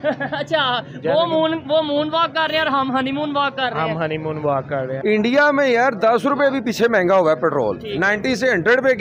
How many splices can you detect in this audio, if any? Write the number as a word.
one